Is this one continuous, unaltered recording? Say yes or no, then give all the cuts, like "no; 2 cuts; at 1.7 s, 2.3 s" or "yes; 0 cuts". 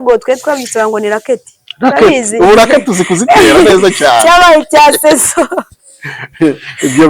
yes; 0 cuts